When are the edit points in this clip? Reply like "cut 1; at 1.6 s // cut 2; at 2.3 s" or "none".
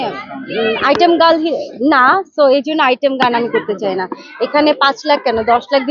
none